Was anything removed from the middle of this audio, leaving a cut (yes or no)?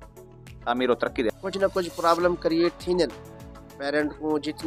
yes